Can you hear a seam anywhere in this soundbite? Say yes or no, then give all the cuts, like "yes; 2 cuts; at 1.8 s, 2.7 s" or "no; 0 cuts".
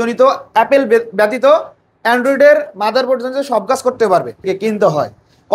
yes; 1 cut; at 4.4 s